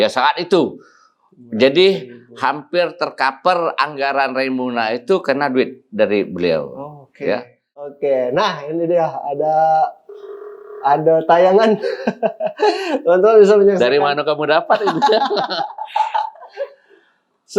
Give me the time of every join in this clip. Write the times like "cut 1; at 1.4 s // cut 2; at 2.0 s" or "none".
cut 1; at 7.9 s

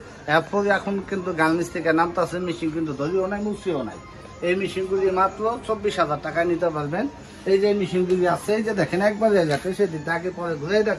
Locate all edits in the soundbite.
none

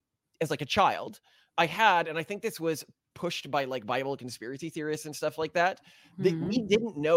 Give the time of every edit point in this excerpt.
none

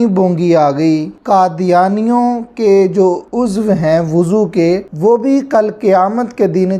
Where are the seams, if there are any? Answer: cut 1; at 1.2 s

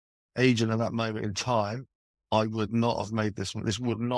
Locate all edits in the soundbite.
none

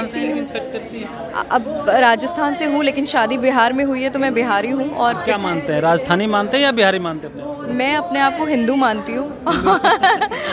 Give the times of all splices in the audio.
none

